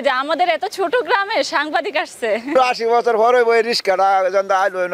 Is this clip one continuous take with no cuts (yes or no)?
no